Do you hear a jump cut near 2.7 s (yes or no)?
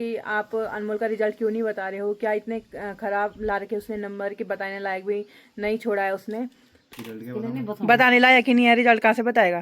no